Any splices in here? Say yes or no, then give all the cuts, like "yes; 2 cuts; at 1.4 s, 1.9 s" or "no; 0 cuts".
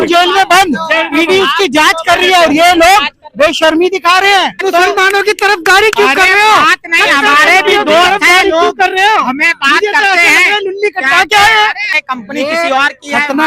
yes; 2 cuts; at 4.6 s, 11.9 s